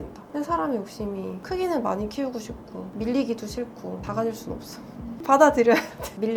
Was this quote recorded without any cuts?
yes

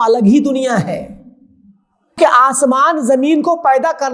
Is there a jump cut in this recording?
yes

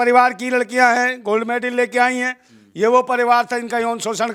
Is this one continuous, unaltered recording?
yes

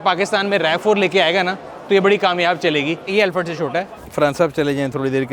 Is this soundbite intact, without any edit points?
no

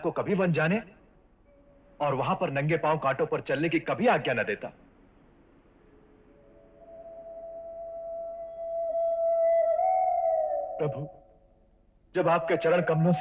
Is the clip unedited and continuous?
yes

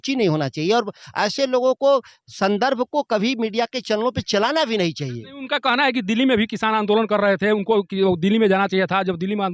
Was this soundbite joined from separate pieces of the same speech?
no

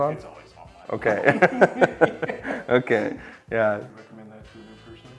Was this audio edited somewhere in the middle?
yes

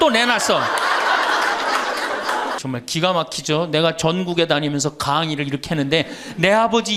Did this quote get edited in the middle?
yes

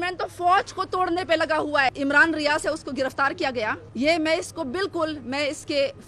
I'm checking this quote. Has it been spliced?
yes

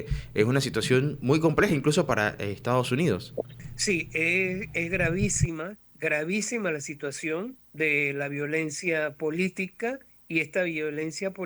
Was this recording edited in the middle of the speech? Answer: yes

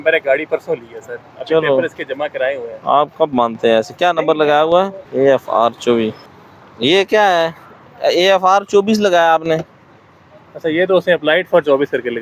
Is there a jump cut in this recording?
no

